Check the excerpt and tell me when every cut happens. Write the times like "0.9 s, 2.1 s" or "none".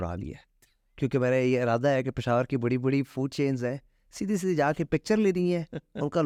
none